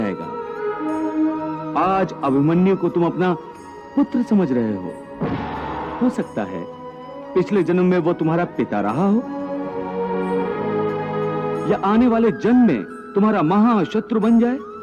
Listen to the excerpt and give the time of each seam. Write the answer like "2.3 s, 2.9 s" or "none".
5.9 s